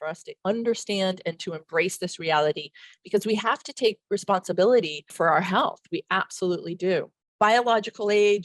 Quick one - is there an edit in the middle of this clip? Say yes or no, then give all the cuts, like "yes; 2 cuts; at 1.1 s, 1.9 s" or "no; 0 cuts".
yes; 2 cuts; at 5.0 s, 7.2 s